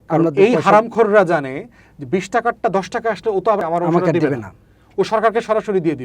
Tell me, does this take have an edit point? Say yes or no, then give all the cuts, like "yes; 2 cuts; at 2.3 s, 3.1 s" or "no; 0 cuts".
yes; 1 cut; at 3.6 s